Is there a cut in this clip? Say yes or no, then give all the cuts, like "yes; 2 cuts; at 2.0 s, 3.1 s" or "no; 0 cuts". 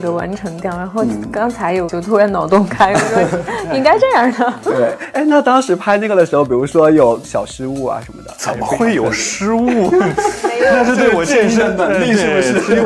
no; 0 cuts